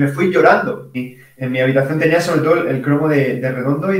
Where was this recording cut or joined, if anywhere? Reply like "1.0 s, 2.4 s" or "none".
1.0 s